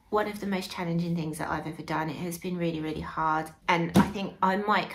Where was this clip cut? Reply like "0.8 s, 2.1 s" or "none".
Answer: 3.5 s